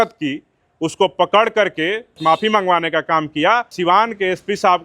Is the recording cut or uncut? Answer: cut